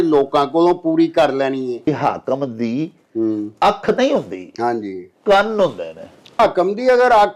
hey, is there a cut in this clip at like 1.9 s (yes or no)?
yes